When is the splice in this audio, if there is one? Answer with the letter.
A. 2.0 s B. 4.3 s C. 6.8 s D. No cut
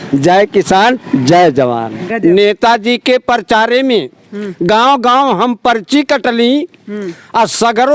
A